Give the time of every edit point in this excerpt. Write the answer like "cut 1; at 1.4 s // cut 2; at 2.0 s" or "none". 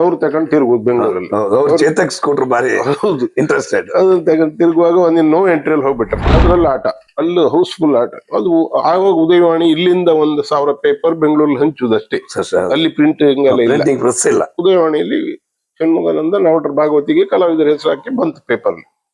cut 1; at 6.2 s